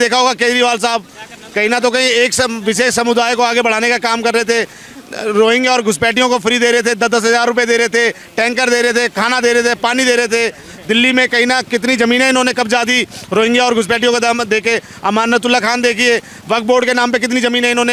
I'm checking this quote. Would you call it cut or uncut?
uncut